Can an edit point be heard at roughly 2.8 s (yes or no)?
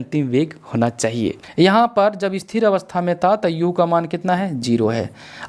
no